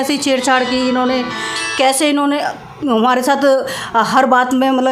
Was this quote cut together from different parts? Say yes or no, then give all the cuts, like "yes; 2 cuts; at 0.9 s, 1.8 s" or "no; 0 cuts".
no; 0 cuts